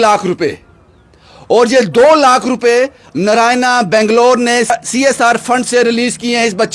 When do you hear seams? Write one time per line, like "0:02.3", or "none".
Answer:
0:04.7